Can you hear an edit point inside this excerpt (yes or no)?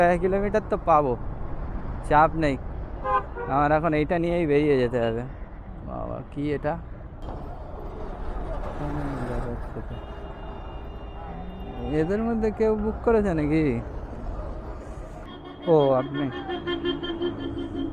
yes